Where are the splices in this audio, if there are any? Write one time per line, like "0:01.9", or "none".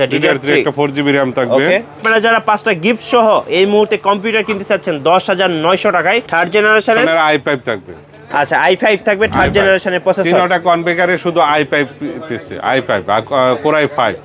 0:02.0
0:06.3